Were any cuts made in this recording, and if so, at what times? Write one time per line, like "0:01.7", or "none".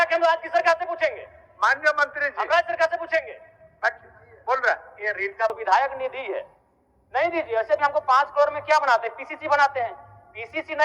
0:05.5